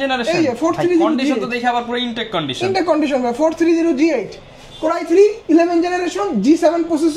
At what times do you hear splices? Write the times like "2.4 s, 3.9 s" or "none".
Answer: none